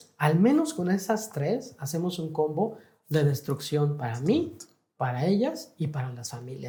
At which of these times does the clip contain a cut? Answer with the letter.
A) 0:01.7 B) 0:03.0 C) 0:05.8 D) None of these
D